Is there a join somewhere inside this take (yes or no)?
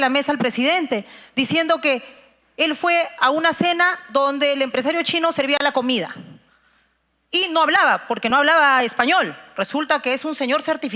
no